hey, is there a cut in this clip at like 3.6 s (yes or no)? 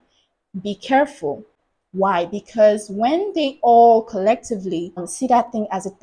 no